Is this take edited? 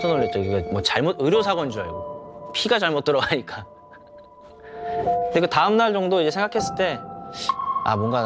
no; 0 cuts

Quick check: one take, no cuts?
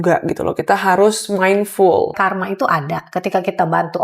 no; 1 cut; at 2.2 s

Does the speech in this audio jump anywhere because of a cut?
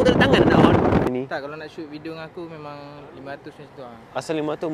yes; 1 cut; at 1.1 s

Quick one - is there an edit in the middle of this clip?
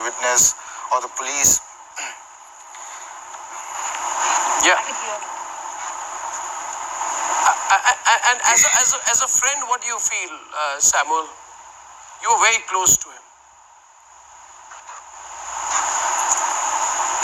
no; 0 cuts

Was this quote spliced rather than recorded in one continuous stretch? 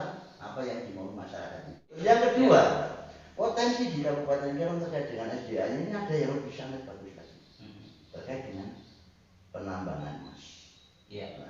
yes; 1 cut; at 2.0 s

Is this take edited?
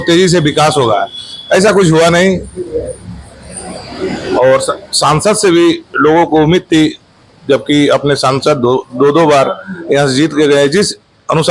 no; 0 cuts

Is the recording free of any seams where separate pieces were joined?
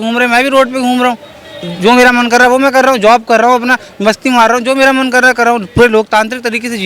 yes; 0 cuts

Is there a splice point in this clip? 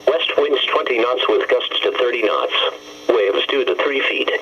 yes; 2 cuts; at 2.2 s, 3.4 s

